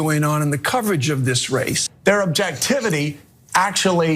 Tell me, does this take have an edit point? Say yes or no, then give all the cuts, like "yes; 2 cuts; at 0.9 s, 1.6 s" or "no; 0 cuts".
yes; 1 cut; at 1.8 s